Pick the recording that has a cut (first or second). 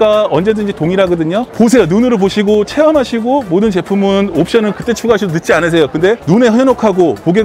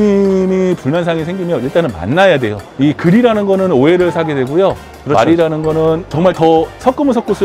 second